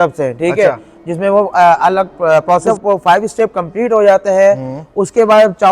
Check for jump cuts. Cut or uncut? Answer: cut